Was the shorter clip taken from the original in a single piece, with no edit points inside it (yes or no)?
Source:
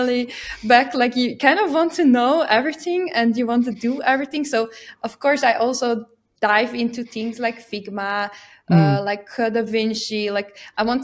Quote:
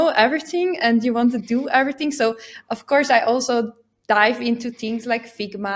yes